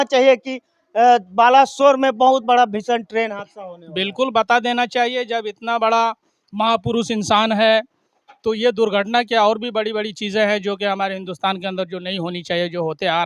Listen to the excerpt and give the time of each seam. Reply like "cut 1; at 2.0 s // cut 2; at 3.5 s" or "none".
none